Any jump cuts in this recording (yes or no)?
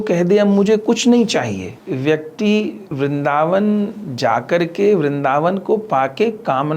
yes